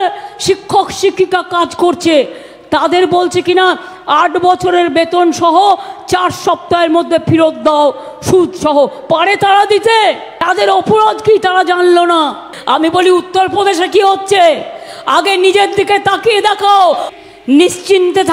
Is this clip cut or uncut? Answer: cut